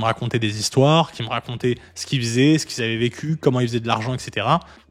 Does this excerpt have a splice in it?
no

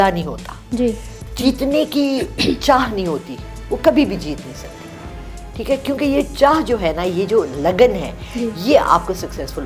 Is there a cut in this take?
no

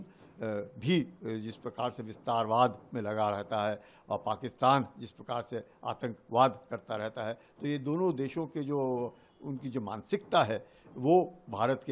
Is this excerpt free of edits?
yes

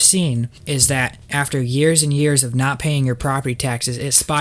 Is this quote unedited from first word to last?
no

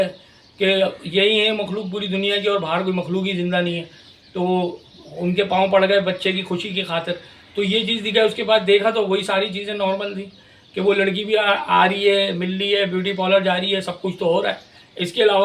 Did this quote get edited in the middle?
no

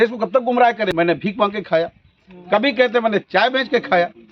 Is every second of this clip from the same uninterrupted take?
no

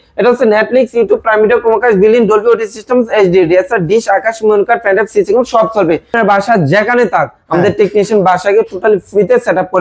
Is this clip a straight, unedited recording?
no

